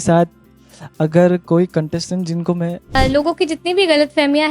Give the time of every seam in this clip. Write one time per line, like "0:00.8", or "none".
0:03.0